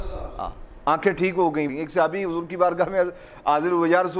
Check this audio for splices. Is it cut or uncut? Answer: cut